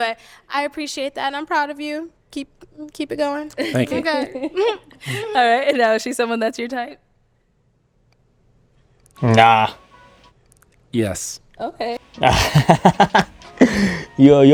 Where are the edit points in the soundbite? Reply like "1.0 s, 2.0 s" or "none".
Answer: none